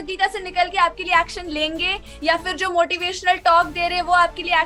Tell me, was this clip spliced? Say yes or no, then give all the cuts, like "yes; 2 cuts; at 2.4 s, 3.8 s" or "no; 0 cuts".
no; 0 cuts